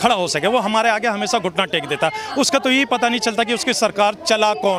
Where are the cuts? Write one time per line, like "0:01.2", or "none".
none